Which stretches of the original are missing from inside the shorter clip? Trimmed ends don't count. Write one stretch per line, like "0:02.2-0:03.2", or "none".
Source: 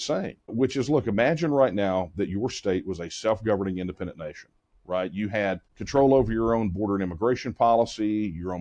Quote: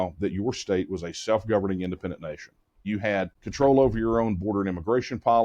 0:05.0-0:05.4